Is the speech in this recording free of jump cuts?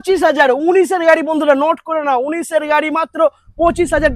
yes; 0 cuts

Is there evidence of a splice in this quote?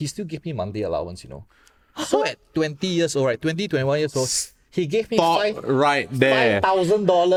no; 0 cuts

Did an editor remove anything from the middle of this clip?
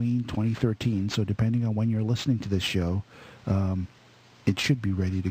no; 0 cuts

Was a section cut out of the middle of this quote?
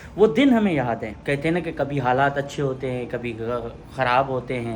no; 0 cuts

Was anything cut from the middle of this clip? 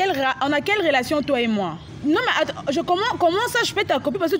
yes; 1 cut; at 1.9 s

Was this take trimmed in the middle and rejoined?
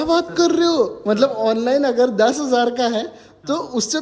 no; 0 cuts

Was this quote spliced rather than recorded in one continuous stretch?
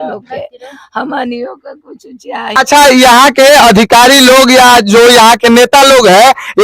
yes; 1 cut; at 2.5 s

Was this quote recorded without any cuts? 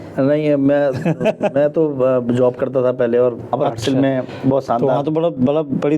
no; 1 cut; at 3.5 s

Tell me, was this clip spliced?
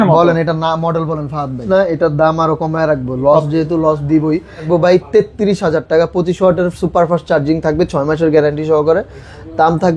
yes; 2 cuts; at 1.6 s, 4.7 s

